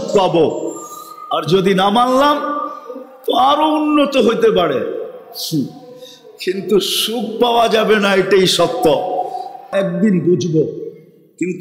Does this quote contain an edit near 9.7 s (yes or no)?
yes